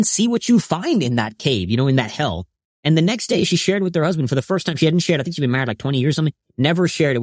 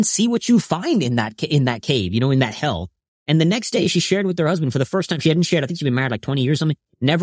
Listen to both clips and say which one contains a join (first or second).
first